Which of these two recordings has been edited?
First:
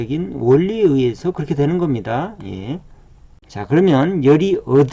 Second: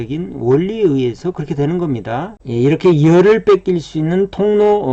second; 1 cut; at 2.4 s

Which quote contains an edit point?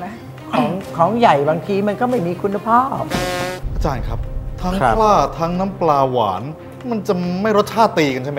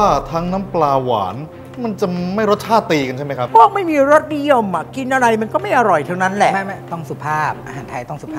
first; 1 cut; at 3.6 s

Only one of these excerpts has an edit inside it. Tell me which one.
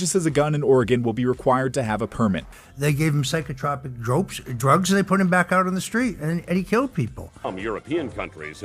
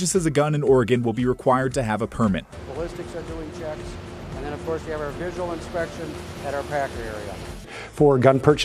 first; 2 cuts; at 2.6 s, 7.3 s

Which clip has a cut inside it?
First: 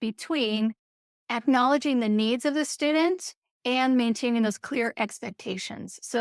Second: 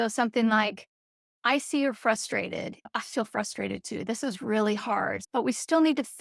second; 2 cuts; at 2.9 s, 5.2 s

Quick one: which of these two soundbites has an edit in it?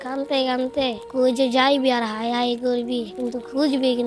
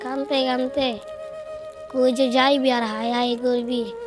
first; 2 cuts; at 1.0 s, 3.1 s

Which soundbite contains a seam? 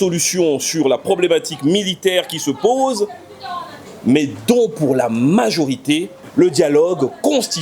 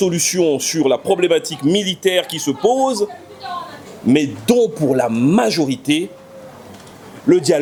first; 1 cut; at 6.2 s

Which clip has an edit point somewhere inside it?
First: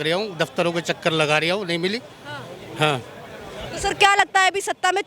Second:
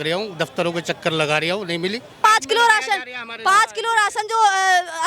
second; 1 cut; at 2.2 s

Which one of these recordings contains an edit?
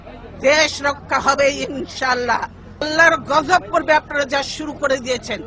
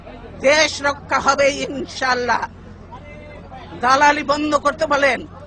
first; 1 cut; at 2.8 s

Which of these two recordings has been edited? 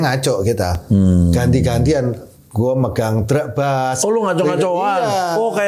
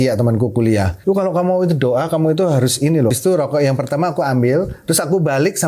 second; 2 cuts; at 0.9 s, 3.1 s

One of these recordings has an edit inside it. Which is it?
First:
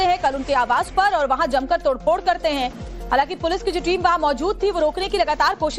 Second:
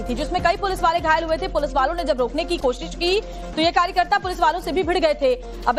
first; 1 cut; at 2.5 s

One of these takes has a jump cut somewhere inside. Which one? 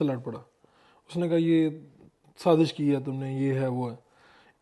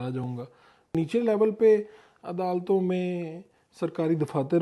second; 1 cut; at 0.9 s

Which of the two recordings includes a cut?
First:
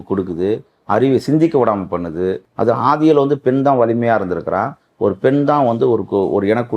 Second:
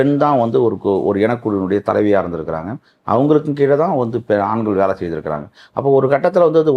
first; 1 cut; at 2.5 s

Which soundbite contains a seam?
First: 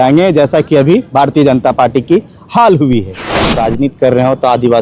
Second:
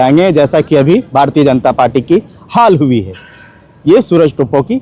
first; 1 cut; at 3.6 s

